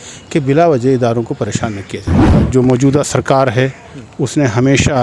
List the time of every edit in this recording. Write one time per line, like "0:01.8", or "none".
0:02.3

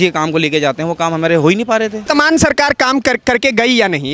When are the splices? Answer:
0:02.0

